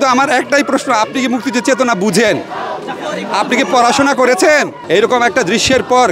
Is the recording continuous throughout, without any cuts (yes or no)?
no